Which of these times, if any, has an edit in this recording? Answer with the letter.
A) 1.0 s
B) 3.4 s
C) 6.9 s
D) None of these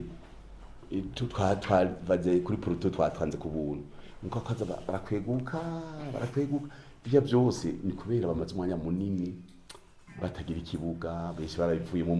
D